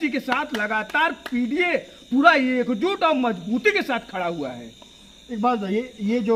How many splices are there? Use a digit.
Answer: 0